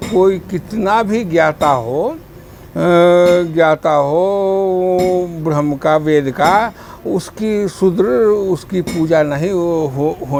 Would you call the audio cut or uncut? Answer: uncut